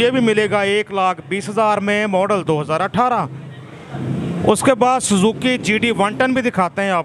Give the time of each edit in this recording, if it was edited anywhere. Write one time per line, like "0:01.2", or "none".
none